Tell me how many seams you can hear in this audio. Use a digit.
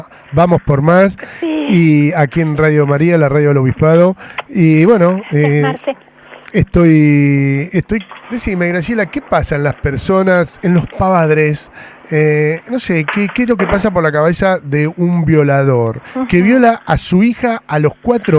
0